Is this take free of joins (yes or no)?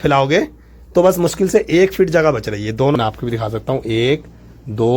no